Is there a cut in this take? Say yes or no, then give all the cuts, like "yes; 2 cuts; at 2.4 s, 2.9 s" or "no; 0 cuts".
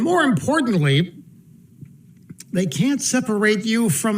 no; 0 cuts